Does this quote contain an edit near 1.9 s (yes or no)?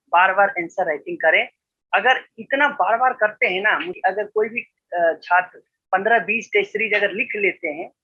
no